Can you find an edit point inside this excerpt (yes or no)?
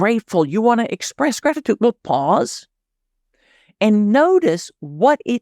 yes